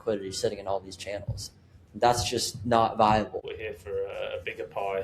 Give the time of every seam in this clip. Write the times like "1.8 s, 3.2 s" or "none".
3.4 s